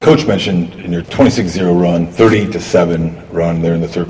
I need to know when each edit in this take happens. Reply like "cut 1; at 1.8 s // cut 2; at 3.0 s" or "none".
cut 1; at 1.1 s